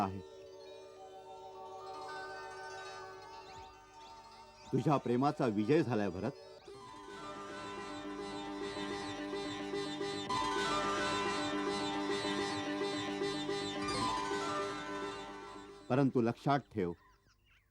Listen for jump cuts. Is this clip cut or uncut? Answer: uncut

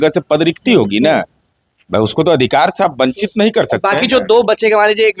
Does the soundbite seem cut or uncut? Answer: uncut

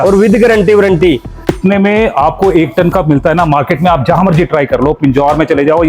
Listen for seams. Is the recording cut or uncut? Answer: cut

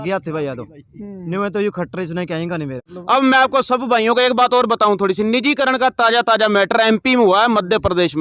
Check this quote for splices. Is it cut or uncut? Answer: cut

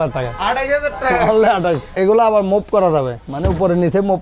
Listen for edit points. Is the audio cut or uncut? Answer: cut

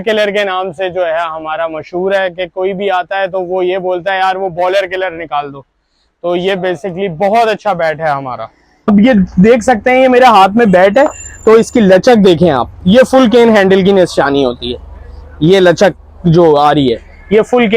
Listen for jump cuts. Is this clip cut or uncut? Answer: cut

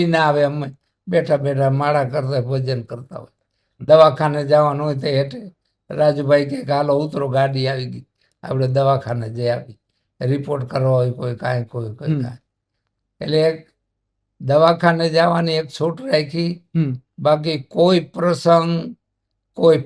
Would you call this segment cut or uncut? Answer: uncut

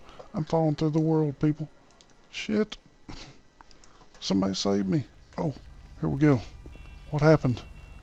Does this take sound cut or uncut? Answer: uncut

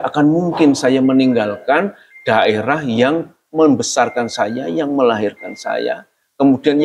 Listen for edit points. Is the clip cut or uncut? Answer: uncut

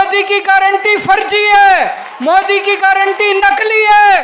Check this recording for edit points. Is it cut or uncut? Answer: uncut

